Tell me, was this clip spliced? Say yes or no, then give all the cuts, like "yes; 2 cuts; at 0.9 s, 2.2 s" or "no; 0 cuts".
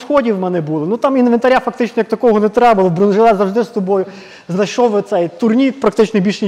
no; 0 cuts